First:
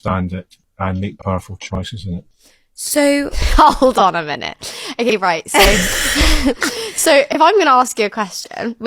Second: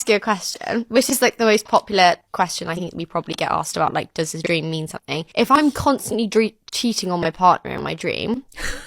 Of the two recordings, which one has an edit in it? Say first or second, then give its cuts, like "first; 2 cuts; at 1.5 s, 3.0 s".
second; 2 cuts; at 2.3 s, 5.3 s